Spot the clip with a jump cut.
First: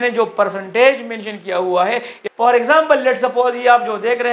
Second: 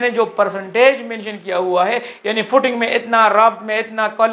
first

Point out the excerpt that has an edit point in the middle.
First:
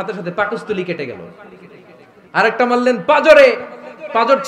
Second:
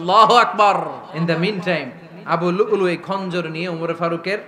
second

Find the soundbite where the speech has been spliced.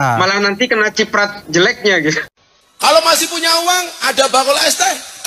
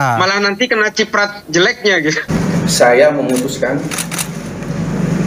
second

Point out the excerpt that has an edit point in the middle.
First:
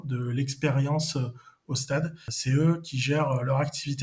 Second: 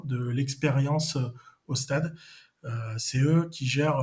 first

